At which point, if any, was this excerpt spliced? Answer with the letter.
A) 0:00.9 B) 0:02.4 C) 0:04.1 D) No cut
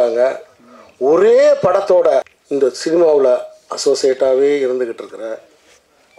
B